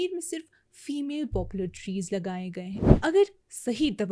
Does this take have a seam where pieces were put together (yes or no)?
yes